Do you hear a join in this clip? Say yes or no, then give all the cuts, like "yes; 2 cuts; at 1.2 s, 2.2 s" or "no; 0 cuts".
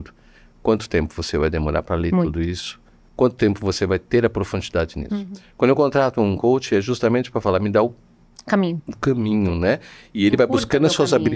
no; 0 cuts